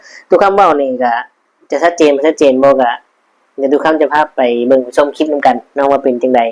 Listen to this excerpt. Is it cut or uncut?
uncut